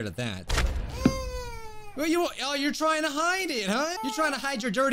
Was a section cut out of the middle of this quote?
yes; 1 cut; at 4.0 s

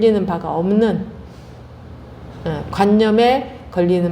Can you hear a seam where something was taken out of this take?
no; 0 cuts

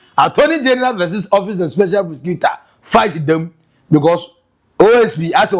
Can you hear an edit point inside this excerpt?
no; 0 cuts

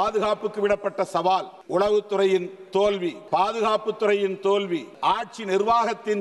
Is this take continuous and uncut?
no; 3 cuts; at 1.6 s, 3.2 s, 4.9 s

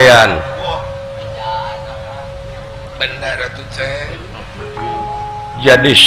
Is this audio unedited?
yes; 0 cuts

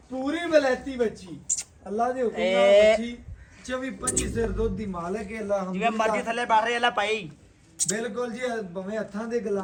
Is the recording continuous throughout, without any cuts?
yes; 0 cuts

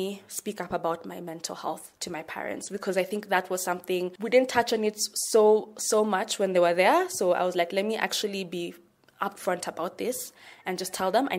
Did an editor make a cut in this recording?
yes; 2 cuts; at 1.9 s, 4.2 s

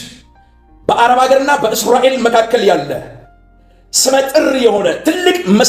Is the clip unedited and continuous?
yes; 0 cuts

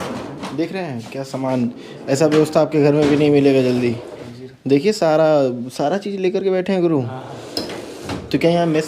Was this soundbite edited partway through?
no; 0 cuts

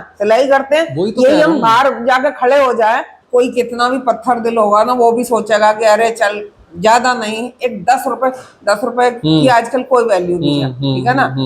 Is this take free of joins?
no; 1 cut; at 3.2 s

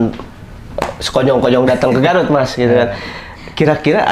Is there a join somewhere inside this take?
no; 0 cuts

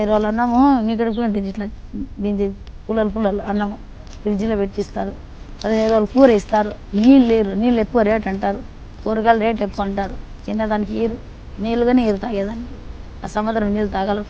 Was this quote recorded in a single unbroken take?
yes; 0 cuts

